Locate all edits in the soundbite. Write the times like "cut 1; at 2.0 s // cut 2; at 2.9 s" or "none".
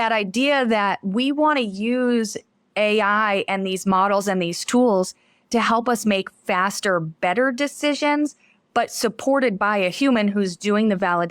none